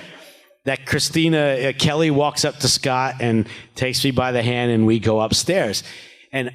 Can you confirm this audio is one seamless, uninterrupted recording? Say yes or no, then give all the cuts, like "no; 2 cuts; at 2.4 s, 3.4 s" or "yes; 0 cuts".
yes; 0 cuts